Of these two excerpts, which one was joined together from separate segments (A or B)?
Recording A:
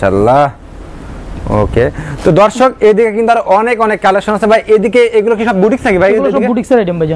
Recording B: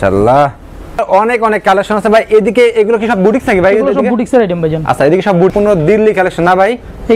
B